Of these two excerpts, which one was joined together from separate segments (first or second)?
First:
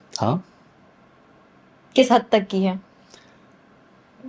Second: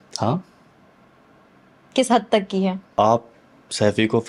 second